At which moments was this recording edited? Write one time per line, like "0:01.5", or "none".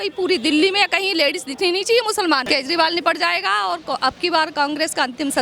0:02.4